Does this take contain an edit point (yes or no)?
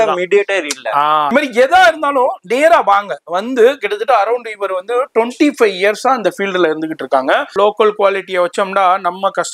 yes